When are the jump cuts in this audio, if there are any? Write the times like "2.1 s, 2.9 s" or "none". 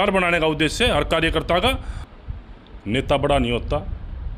2.0 s